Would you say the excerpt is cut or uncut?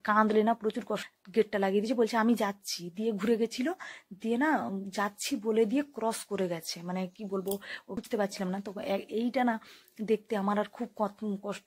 cut